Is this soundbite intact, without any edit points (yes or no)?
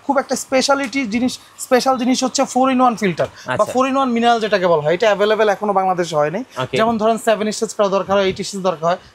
yes